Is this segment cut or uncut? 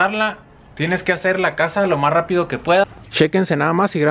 cut